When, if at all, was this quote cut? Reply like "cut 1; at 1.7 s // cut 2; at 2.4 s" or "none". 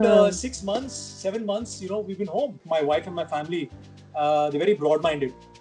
cut 1; at 2.6 s